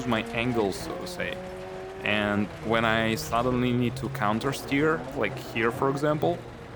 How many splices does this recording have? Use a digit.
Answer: 0